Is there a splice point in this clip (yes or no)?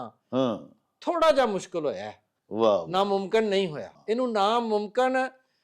yes